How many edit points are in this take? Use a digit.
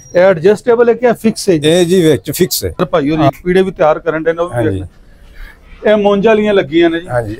1